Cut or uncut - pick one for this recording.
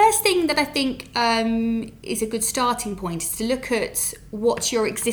uncut